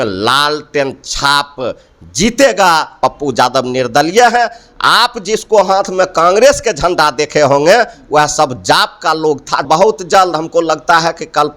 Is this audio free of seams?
no; 2 cuts; at 3.0 s, 9.7 s

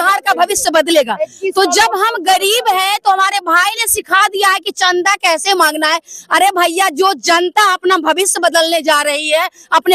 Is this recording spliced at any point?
no; 0 cuts

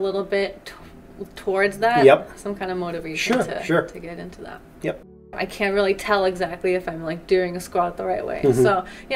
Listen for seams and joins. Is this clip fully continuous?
no; 1 cut; at 5.4 s

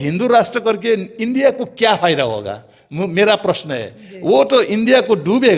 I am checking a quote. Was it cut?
no; 0 cuts

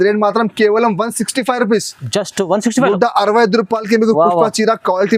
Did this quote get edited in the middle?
no; 0 cuts

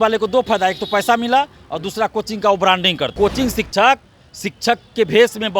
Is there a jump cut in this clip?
yes; 1 cut; at 3.1 s

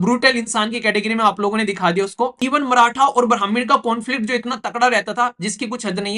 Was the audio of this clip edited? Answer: yes; 1 cut; at 2.4 s

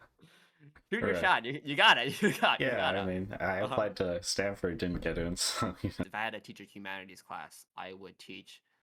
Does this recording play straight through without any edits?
no; 1 cut; at 6.0 s

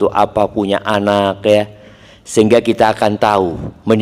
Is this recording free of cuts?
yes; 0 cuts

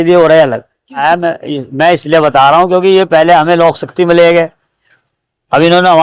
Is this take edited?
yes; 1 cut; at 1.0 s

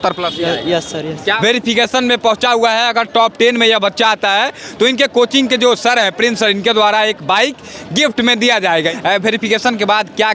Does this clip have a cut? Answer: yes; 2 cuts; at 1.4 s, 8.9 s

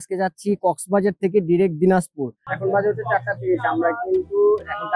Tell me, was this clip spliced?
yes; 1 cut; at 2.5 s

